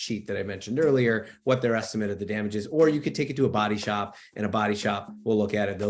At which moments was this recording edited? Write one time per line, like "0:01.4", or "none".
none